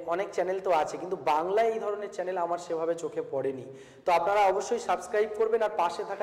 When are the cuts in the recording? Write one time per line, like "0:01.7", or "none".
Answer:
none